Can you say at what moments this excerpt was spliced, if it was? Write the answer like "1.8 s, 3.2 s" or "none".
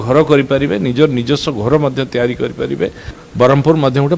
3.2 s